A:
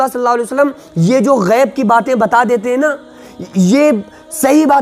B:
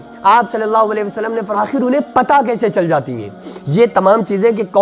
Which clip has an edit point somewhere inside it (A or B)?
B